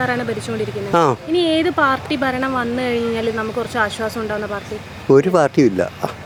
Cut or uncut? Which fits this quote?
uncut